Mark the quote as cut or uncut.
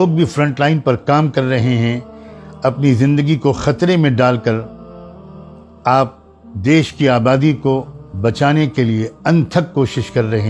uncut